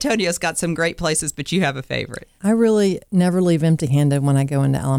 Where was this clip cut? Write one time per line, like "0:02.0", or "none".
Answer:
0:02.2
0:03.0